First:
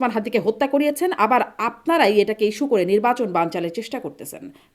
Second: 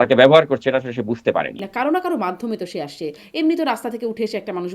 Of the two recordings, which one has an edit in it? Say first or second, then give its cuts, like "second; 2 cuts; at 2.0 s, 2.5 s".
second; 1 cut; at 1.6 s